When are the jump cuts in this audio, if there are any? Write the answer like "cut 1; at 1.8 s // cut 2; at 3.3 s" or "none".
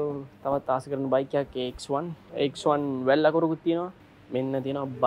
cut 1; at 2.2 s // cut 2; at 4.0 s